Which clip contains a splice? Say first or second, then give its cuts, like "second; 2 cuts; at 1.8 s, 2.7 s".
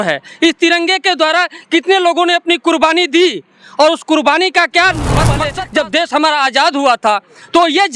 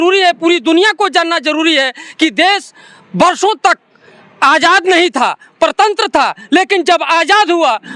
first; 1 cut; at 5.4 s